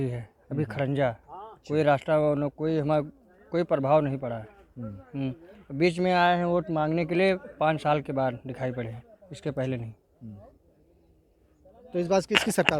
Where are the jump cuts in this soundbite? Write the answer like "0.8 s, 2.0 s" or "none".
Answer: none